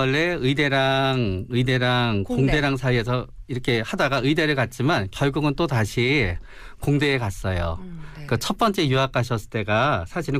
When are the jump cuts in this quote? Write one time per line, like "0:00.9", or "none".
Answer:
0:05.4